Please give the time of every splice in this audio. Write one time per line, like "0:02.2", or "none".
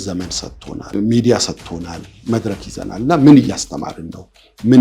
0:00.9
0:02.1